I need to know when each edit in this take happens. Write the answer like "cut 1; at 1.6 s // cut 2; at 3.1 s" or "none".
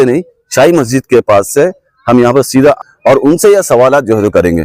cut 1; at 2.8 s